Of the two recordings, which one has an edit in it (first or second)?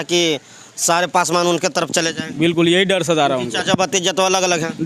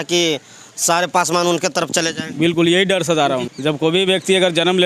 second